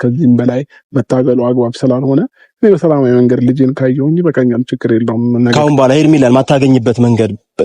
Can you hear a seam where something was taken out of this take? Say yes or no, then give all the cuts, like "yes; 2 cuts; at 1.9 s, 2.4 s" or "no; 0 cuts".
yes; 1 cut; at 5.5 s